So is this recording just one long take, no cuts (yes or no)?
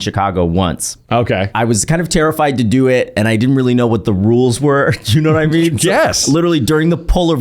no